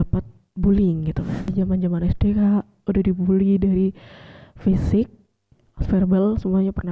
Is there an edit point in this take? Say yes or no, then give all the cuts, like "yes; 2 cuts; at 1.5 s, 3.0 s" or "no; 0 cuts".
yes; 1 cut; at 1.5 s